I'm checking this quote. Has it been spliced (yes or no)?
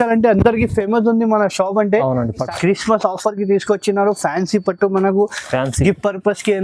yes